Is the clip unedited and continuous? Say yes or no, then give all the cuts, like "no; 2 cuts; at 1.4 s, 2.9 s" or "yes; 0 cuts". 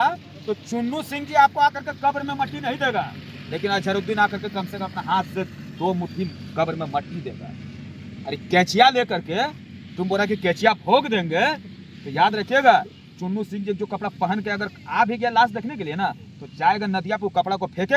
yes; 0 cuts